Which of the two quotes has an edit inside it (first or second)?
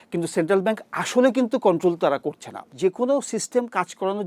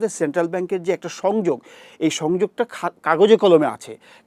first